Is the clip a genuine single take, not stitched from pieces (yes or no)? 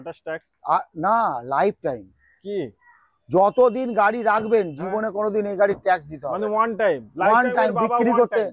yes